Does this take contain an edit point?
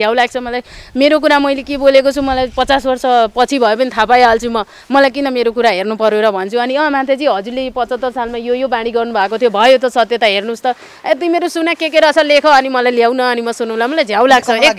no; 0 cuts

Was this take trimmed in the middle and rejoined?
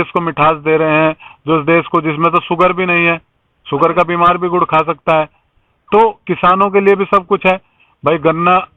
no; 0 cuts

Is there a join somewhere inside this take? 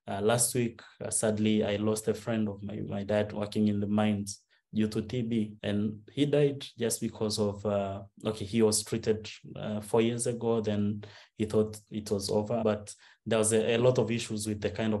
yes; 2 cuts; at 5.6 s, 12.6 s

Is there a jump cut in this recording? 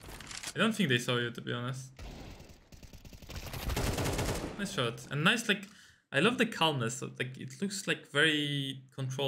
no; 0 cuts

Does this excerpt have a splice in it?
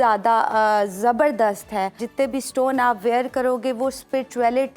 yes; 1 cut; at 2.0 s

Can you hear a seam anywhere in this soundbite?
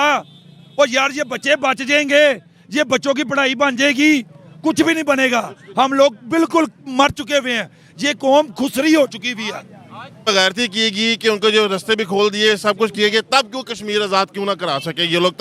yes; 1 cut; at 10.3 s

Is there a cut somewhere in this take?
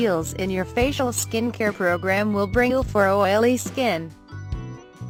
no; 0 cuts

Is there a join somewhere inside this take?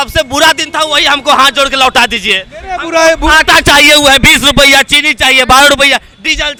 no; 0 cuts

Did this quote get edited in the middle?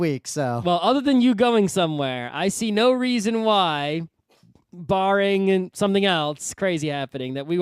no; 0 cuts

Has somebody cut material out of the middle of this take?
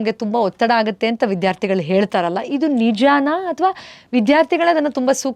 no; 0 cuts

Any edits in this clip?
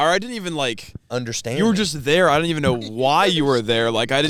no; 0 cuts

